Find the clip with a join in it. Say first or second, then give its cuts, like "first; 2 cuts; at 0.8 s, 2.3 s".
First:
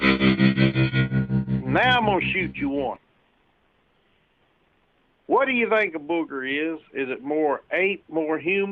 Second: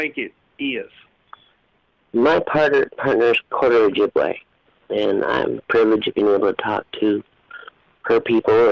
first; 1 cut; at 1.5 s